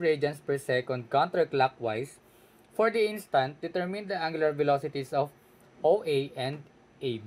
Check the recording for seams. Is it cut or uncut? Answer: uncut